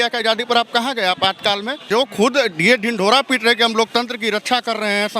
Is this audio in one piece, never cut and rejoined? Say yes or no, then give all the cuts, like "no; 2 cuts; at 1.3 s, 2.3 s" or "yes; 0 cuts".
no; 1 cut; at 1.9 s